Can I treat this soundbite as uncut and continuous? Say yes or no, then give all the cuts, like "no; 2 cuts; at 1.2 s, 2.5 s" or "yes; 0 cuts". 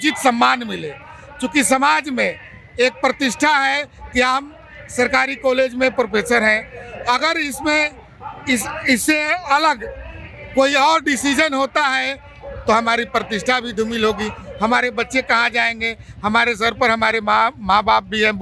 yes; 0 cuts